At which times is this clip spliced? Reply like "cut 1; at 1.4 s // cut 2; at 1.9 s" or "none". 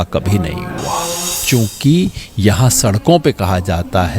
cut 1; at 1.3 s